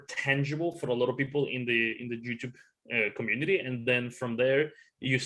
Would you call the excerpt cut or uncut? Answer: uncut